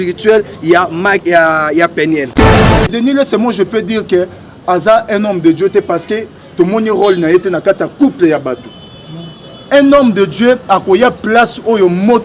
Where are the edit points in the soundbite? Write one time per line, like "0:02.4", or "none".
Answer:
0:02.4